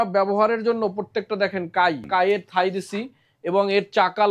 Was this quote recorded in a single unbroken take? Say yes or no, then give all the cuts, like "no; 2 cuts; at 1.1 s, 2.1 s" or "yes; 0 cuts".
no; 1 cut; at 2.1 s